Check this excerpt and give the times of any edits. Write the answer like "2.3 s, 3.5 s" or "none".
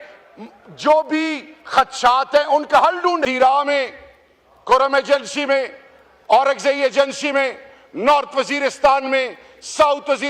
3.2 s